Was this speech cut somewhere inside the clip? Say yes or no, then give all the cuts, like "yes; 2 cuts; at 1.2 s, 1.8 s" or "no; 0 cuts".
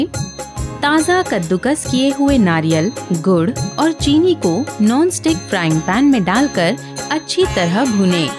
no; 0 cuts